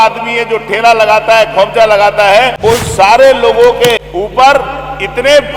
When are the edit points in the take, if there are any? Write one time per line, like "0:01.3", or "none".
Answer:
0:02.5
0:04.0